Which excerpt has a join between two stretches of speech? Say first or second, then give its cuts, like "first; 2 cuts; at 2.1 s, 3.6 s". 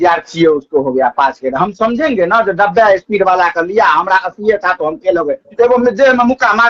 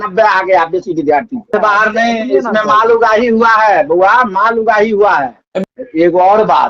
second; 2 cuts; at 1.5 s, 5.4 s